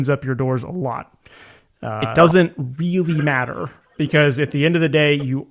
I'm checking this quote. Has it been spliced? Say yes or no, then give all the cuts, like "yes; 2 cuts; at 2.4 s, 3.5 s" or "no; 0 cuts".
yes; 1 cut; at 2.0 s